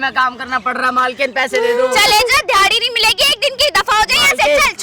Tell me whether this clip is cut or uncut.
uncut